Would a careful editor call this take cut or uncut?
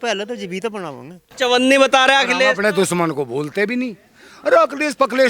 cut